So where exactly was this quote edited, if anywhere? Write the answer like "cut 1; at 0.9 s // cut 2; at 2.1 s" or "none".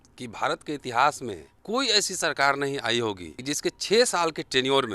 cut 1; at 1.5 s // cut 2; at 3.3 s